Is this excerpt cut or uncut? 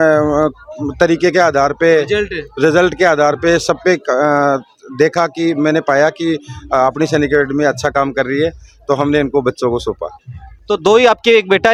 uncut